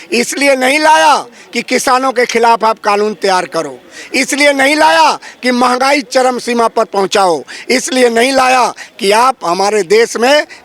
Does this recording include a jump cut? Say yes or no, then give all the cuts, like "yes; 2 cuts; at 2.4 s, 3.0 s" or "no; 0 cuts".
no; 0 cuts